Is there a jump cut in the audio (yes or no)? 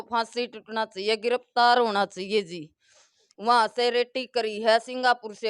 yes